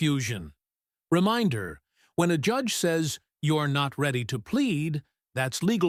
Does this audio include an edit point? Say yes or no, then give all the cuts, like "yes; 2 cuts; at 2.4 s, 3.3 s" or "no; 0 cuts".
no; 0 cuts